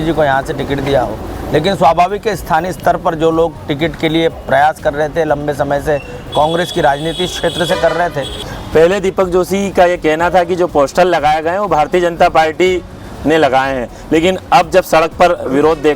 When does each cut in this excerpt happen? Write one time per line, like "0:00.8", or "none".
0:08.4